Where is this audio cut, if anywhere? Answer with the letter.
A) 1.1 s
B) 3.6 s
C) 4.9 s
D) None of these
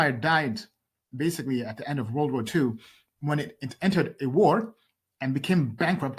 D